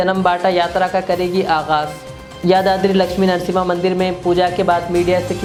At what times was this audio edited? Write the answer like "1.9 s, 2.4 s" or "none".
none